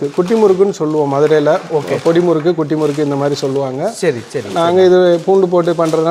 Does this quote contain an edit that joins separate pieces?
no; 0 cuts

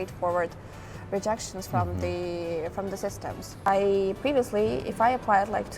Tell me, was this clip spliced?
yes; 1 cut; at 3.7 s

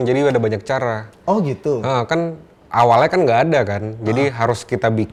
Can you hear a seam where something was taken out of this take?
no; 0 cuts

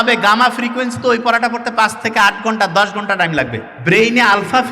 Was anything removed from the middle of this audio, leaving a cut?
yes; 1 cut; at 3.7 s

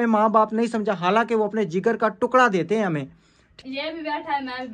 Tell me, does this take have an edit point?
yes; 1 cut; at 3.5 s

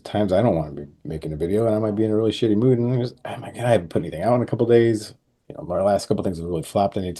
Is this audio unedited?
yes; 0 cuts

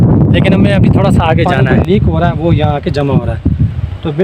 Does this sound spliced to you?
yes; 1 cut; at 1.8 s

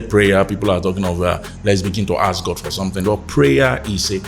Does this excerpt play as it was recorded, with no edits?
yes; 0 cuts

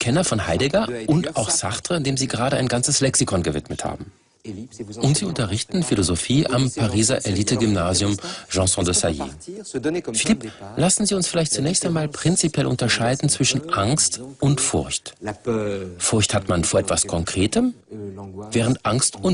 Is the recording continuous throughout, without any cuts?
no; 1 cut; at 15.2 s

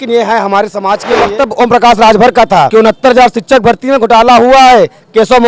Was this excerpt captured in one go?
no; 2 cuts; at 1.1 s, 2.7 s

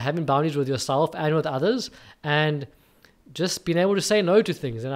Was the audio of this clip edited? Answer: no; 0 cuts

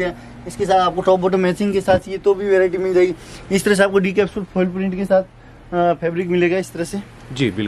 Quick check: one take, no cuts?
yes; 0 cuts

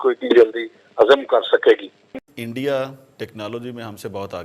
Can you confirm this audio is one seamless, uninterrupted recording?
no; 1 cut; at 2.2 s

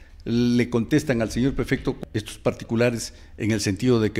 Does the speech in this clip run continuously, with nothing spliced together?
no; 1 cut; at 2.0 s

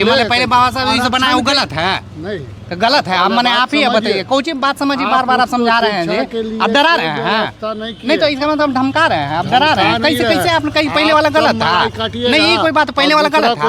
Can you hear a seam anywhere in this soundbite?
no; 0 cuts

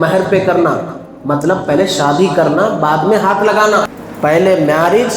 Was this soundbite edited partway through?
yes; 1 cut; at 3.9 s

